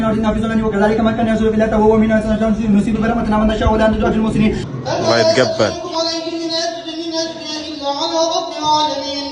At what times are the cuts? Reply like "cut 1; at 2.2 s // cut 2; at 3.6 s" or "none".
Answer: none